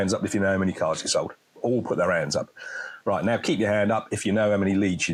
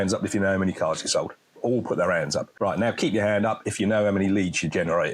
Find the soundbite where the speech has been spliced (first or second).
second